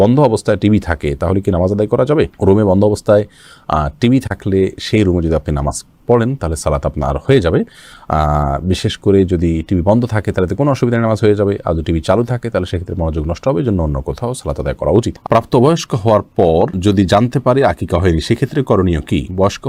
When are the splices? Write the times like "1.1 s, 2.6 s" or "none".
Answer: none